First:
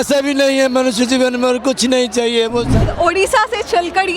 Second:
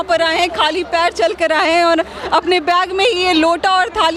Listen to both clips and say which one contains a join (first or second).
first